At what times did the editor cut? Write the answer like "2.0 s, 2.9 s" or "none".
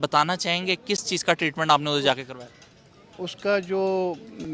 none